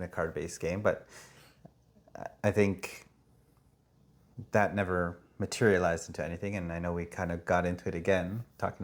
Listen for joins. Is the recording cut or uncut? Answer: uncut